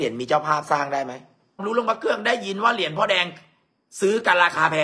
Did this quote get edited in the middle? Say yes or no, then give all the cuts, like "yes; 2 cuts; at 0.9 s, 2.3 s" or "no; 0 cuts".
yes; 1 cut; at 1.6 s